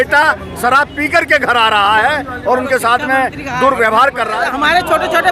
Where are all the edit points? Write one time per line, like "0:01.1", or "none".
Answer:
0:04.4